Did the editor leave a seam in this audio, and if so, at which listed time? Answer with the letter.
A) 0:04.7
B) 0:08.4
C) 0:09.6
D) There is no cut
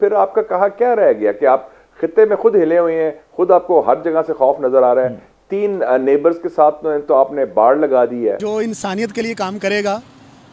B